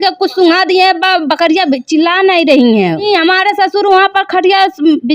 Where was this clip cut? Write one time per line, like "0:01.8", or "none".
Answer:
0:03.0